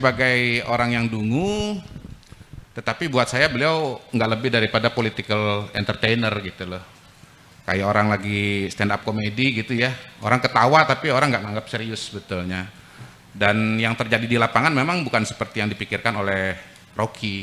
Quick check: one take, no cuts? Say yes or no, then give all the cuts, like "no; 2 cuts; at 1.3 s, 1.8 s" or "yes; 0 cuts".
yes; 0 cuts